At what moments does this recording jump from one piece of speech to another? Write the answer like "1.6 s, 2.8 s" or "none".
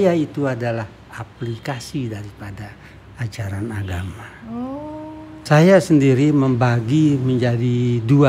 5.3 s